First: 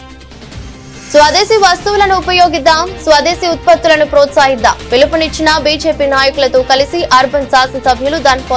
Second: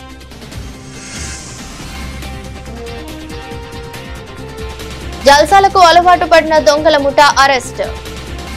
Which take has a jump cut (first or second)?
first